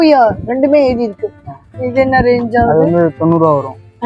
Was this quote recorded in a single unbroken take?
yes; 0 cuts

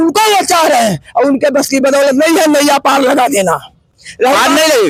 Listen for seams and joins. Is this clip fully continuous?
yes; 0 cuts

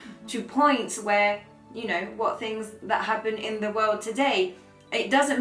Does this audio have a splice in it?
no; 0 cuts

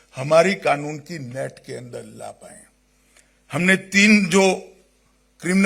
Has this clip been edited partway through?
no; 0 cuts

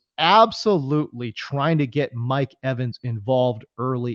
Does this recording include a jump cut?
no; 0 cuts

